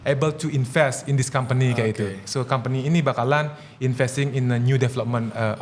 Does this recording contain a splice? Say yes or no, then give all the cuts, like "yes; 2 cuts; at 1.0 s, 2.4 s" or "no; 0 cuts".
no; 0 cuts